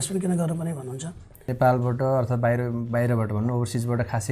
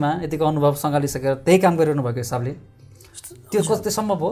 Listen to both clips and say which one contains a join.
first; 1 cut; at 1.4 s

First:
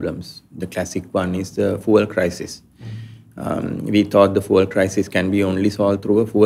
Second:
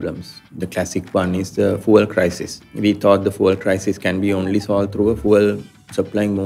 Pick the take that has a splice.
second; 1 cut; at 2.6 s

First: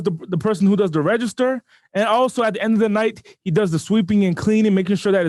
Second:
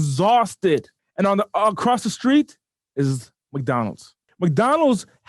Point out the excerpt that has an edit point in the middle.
second; 2 cuts; at 1.0 s, 4.2 s

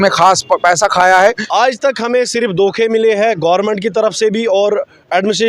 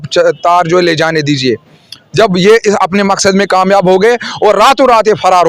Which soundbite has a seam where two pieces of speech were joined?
first; 1 cut; at 1.4 s

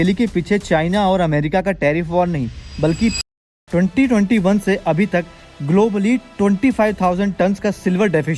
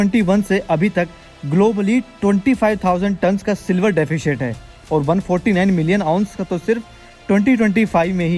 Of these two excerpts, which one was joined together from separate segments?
first; 1 cut; at 3.2 s

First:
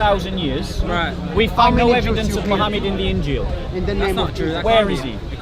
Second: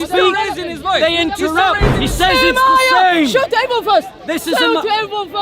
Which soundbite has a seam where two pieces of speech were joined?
second; 1 cut; at 1.9 s

